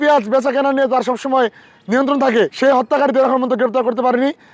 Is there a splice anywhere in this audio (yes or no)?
yes